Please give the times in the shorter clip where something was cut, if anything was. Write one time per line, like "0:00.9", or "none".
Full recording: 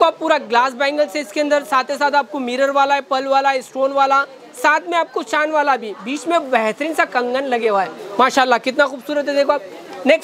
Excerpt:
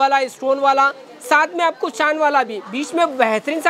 none